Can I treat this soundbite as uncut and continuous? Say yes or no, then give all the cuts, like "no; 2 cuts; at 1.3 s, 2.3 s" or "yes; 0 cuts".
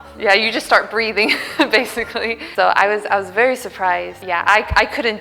no; 1 cut; at 2.4 s